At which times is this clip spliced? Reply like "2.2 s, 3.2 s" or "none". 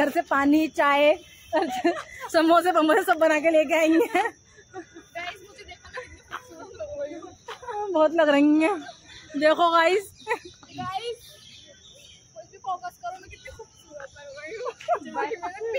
none